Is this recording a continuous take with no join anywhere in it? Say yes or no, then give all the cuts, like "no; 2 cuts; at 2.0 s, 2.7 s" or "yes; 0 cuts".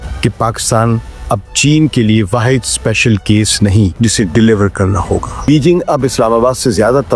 no; 2 cuts; at 3.9 s, 5.4 s